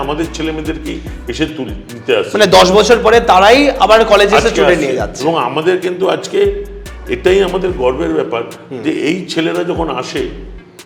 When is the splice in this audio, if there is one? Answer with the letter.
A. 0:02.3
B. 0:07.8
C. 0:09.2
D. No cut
D